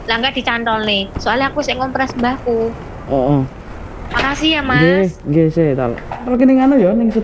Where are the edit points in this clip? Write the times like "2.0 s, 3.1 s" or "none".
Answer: 3.7 s, 6.3 s